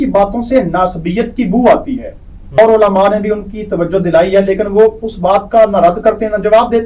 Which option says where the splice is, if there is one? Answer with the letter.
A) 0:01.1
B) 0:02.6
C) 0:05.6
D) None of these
B